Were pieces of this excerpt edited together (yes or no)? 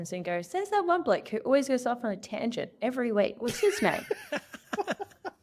no